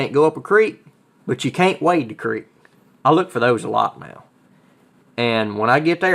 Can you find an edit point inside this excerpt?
no; 0 cuts

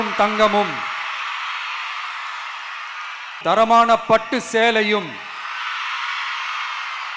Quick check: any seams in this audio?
yes; 1 cut; at 3.4 s

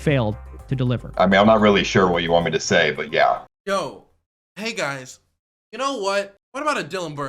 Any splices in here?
yes; 3 cuts; at 1.0 s, 3.4 s, 6.4 s

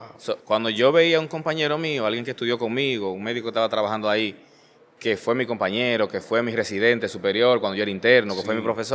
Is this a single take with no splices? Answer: yes; 0 cuts

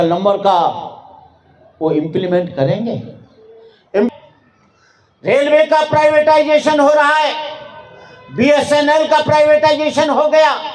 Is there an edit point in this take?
yes; 1 cut; at 4.1 s

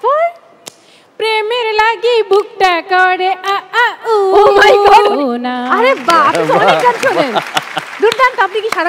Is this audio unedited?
no; 1 cut; at 5.1 s

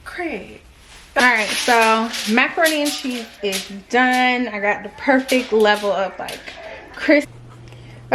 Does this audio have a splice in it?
yes; 2 cuts; at 1.2 s, 7.3 s

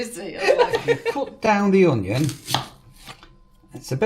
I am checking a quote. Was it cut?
yes; 1 cut; at 1.1 s

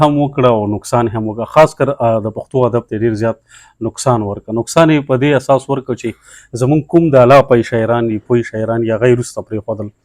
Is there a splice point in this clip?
no; 0 cuts

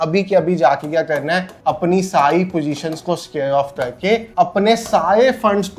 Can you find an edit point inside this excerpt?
no; 0 cuts

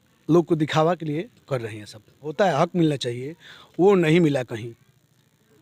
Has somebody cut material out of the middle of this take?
yes; 1 cut; at 2.3 s

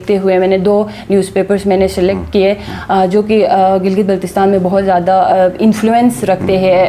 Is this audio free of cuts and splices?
yes; 0 cuts

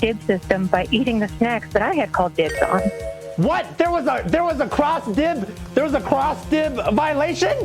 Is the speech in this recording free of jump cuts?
yes; 0 cuts

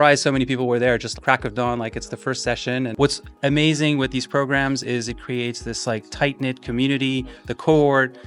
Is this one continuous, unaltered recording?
no; 1 cut; at 2.9 s

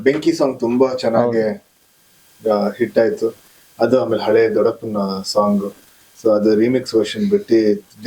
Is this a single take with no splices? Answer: yes; 0 cuts

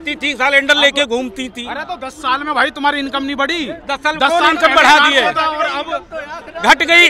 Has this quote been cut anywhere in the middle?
no; 0 cuts

